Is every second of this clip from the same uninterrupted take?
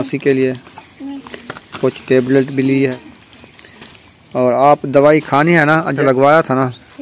no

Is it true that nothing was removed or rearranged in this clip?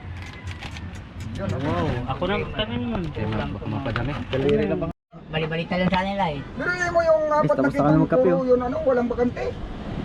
no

